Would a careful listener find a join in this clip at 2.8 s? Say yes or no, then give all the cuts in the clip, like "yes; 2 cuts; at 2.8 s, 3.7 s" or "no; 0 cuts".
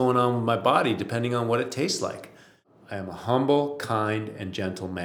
yes; 1 cut; at 2.8 s